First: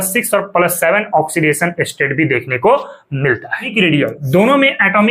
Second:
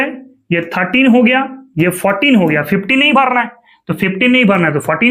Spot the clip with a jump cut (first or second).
first